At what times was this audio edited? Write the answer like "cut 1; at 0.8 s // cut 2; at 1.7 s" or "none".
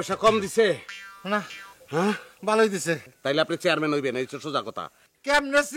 none